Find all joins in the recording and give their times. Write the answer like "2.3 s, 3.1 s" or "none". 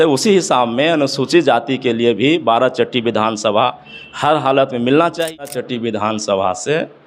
5.4 s